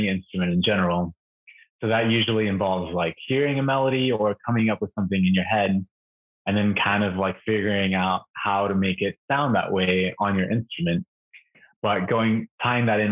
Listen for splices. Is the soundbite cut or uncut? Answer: cut